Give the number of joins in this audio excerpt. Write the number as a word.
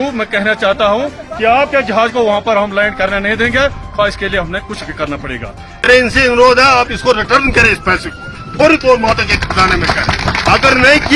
one